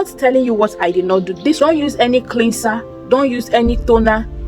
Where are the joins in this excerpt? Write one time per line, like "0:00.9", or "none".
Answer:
0:01.6

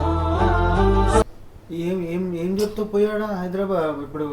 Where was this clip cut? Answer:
0:01.4

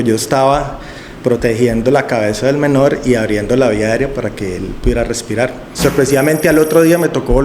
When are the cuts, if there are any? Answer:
0:05.7

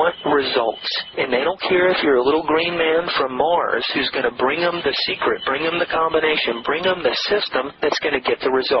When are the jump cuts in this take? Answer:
none

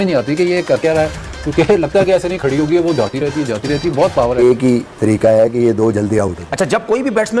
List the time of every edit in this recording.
0:04.4
0:06.4

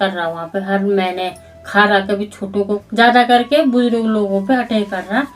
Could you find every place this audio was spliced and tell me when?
0:02.8

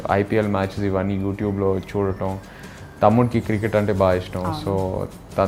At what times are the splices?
none

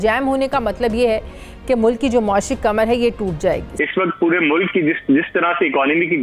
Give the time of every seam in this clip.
0:03.7

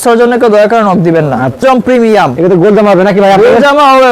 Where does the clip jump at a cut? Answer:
0:01.6

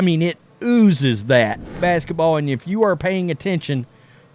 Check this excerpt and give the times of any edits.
0:01.7

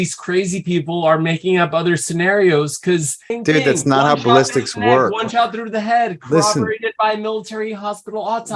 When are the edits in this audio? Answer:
0:03.2

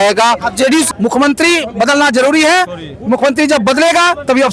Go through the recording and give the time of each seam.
0:00.9

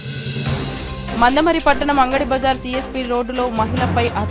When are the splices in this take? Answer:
0:01.1

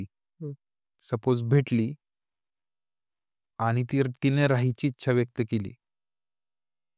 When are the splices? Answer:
none

